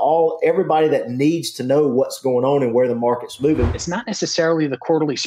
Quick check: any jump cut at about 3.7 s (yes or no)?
yes